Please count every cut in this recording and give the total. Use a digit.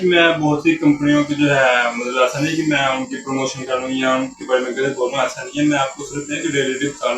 0